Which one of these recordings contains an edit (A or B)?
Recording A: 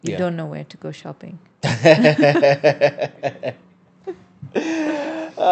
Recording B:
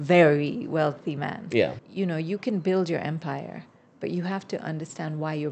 B